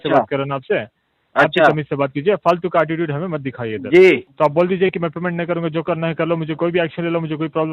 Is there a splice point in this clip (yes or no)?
yes